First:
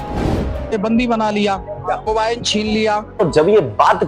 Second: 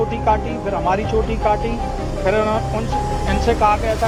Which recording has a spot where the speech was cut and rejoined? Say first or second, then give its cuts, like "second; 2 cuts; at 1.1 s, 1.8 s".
first; 2 cuts; at 2.1 s, 3.2 s